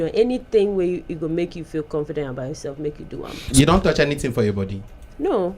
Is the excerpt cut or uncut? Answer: cut